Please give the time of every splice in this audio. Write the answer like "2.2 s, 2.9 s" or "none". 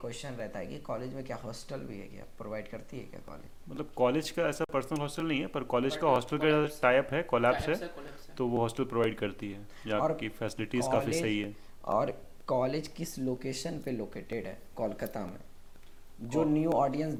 none